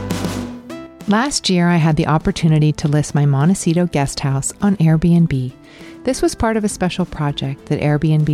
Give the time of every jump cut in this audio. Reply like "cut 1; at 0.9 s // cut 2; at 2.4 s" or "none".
cut 1; at 0.9 s